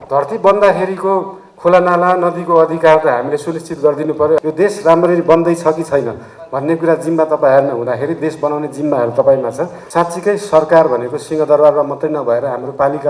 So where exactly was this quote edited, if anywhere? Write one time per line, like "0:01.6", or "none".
0:04.4
0:09.8